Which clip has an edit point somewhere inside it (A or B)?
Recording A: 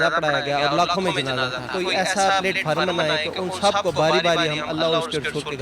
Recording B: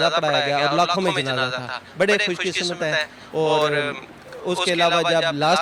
A